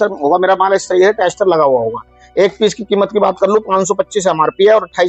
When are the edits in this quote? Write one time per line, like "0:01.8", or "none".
none